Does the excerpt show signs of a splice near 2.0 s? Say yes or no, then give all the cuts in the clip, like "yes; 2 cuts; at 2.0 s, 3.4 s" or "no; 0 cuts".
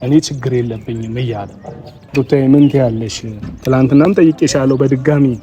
yes; 1 cut; at 2.0 s